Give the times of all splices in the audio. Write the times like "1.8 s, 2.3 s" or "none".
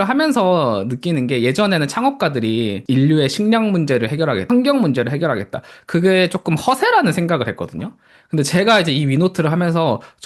2.8 s, 4.5 s